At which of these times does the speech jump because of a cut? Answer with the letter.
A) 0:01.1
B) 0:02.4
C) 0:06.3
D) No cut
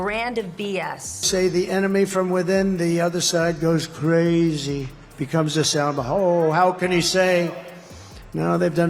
A